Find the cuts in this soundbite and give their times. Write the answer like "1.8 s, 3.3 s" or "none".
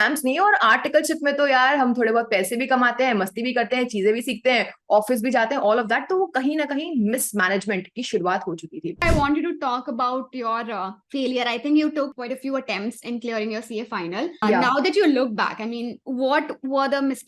9.0 s, 11.0 s, 12.2 s, 14.4 s, 16.0 s